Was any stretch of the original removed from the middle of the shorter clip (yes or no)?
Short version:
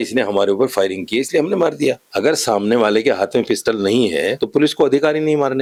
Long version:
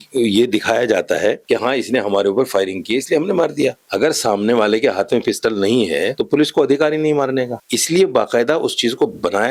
no